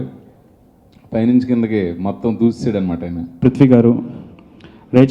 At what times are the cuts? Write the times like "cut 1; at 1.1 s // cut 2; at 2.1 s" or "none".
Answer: cut 1; at 3.3 s